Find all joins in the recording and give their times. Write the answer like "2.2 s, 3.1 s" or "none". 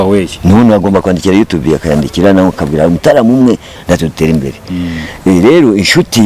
3.7 s